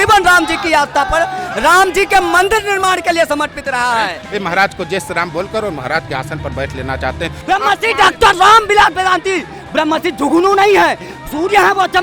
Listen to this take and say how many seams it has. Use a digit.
2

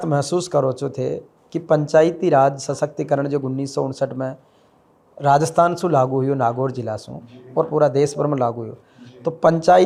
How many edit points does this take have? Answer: 0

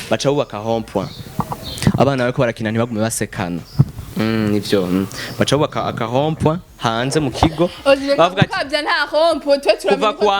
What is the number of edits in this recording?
0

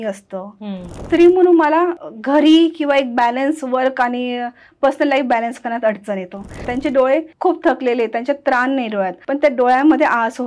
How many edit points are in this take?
5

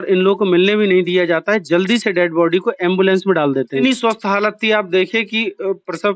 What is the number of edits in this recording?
1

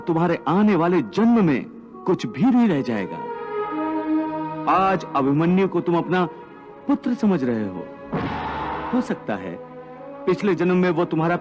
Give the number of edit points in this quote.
1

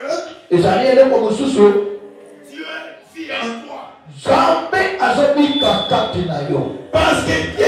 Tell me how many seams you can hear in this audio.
0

